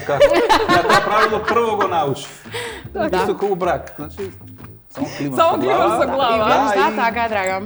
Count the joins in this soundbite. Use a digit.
0